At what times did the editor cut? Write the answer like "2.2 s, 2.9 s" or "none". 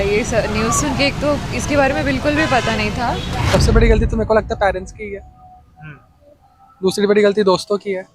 3.3 s